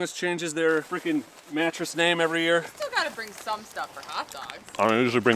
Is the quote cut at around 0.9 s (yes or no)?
yes